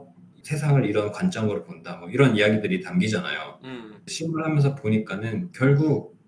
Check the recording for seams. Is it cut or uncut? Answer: cut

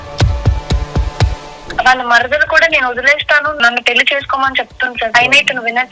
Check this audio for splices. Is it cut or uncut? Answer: cut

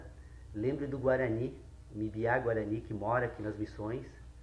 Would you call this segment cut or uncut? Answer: uncut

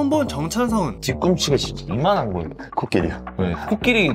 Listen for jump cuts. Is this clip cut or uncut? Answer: cut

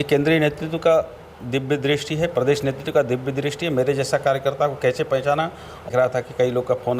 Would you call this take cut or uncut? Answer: cut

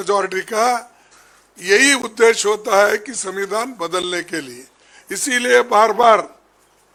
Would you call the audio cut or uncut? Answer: uncut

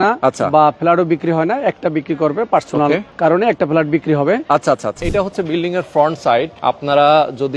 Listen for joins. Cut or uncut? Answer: cut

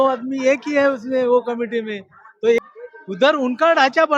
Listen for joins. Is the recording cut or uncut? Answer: cut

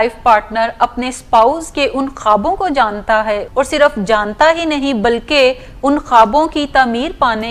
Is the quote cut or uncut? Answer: cut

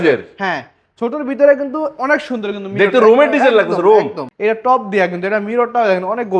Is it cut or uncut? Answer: cut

